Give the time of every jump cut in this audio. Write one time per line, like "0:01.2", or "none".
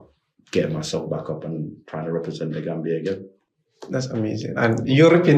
none